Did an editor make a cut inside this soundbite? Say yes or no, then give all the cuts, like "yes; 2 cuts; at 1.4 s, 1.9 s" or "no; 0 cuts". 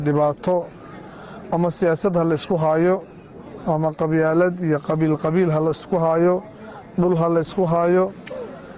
no; 0 cuts